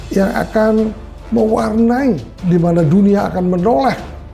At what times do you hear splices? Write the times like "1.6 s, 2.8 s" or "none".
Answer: 2.3 s